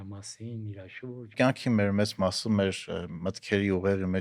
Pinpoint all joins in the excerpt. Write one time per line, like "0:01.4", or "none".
0:01.3